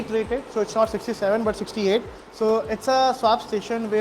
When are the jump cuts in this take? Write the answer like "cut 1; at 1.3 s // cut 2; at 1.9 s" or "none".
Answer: cut 1; at 2.2 s